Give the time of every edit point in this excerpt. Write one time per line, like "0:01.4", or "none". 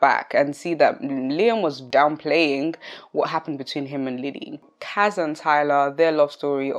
0:01.8
0:04.6